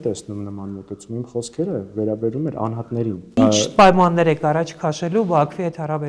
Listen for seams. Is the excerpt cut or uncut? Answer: cut